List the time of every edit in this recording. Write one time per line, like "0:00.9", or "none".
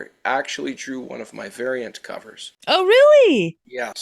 none